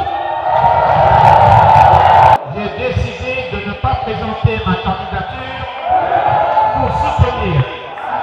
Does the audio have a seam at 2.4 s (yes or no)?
yes